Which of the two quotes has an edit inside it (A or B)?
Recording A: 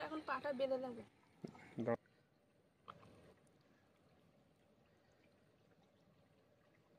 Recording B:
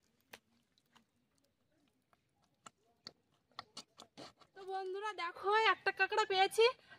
B